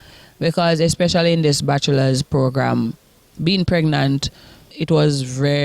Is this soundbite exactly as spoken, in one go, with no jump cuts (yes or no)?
no